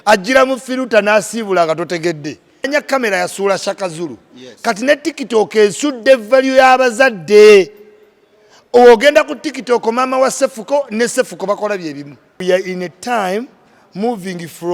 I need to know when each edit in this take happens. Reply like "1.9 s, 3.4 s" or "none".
2.7 s, 12.4 s